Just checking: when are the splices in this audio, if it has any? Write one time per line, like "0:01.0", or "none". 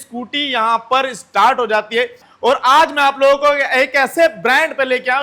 0:02.2